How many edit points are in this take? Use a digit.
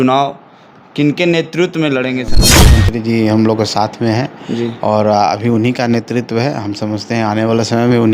1